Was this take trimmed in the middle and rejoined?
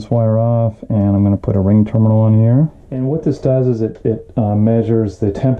yes; 1 cut; at 3.0 s

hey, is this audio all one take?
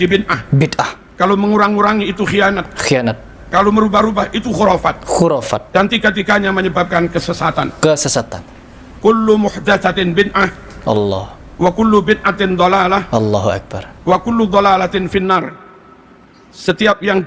yes; 0 cuts

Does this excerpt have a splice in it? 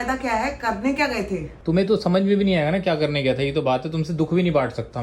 no; 0 cuts

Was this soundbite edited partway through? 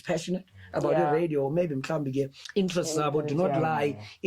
yes; 1 cut; at 2.4 s

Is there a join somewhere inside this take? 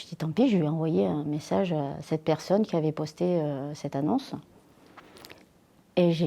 no; 0 cuts

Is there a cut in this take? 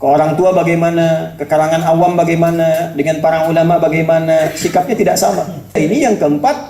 yes; 1 cut; at 5.8 s

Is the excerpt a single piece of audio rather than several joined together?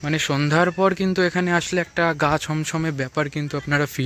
yes; 0 cuts

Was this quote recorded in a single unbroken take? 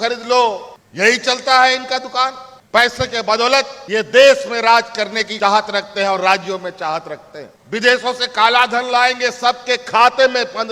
no; 3 cuts; at 3.8 s, 5.2 s, 7.5 s

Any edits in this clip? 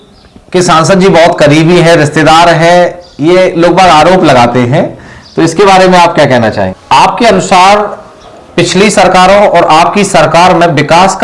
yes; 1 cut; at 6.8 s

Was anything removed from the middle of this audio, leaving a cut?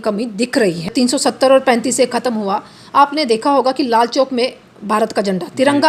yes; 1 cut; at 0.9 s

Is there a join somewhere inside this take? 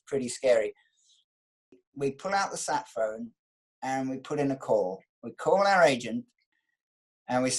yes; 2 cuts; at 1.5 s, 6.4 s

